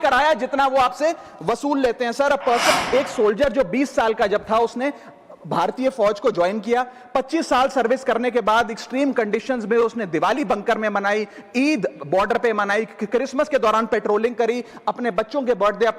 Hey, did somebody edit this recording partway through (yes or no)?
yes